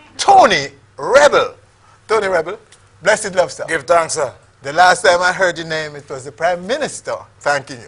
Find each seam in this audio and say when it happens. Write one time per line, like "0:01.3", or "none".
0:01.1